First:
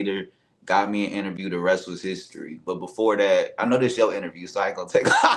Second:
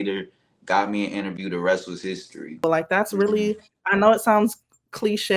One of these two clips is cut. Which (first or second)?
second